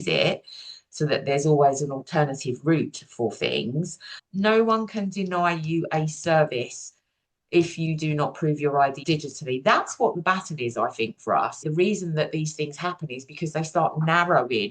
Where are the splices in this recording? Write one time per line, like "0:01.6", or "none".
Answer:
0:04.2
0:09.0
0:11.7